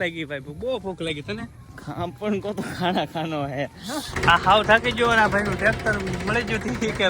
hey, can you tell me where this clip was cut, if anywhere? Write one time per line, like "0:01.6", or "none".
0:03.8